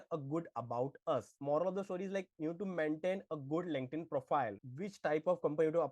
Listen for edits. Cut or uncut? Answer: cut